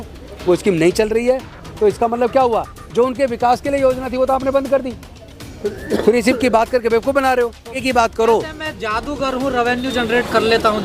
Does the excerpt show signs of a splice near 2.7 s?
no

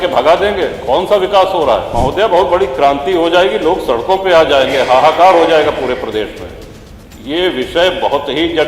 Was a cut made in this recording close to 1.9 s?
yes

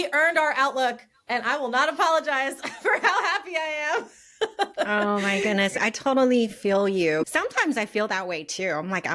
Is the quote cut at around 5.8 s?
yes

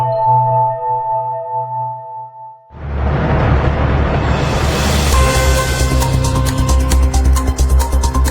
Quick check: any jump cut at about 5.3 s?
no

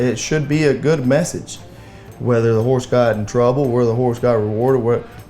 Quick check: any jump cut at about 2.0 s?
no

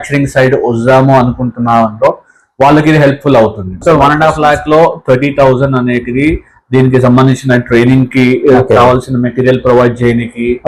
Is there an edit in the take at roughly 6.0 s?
no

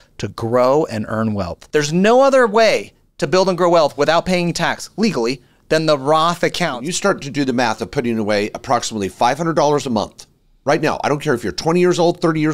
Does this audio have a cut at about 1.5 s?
yes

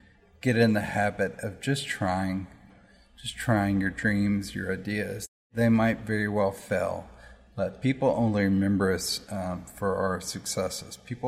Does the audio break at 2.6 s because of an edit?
yes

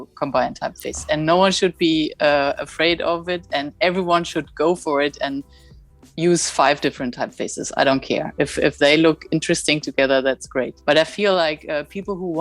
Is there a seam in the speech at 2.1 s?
no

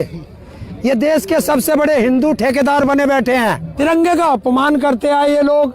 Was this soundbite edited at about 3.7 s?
yes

